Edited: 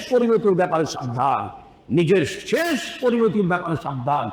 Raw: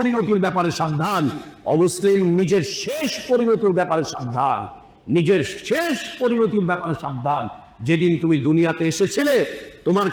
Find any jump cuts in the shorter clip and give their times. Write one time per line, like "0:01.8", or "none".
none